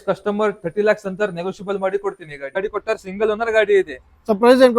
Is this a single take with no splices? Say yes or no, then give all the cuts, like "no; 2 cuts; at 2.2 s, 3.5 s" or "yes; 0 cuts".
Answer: no; 1 cut; at 2.6 s